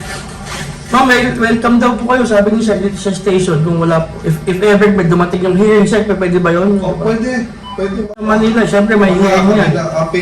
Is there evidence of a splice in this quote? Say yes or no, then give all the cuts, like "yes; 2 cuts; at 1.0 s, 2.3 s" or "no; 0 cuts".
yes; 1 cut; at 8.1 s